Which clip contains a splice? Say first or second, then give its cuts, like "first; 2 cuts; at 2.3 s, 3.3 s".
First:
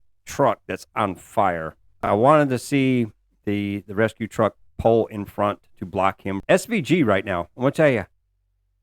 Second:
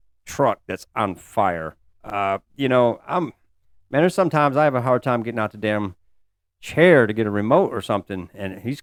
first; 2 cuts; at 2.0 s, 6.4 s